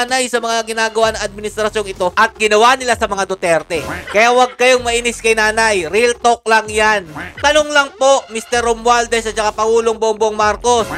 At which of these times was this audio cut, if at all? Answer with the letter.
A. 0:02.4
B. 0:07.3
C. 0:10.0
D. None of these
B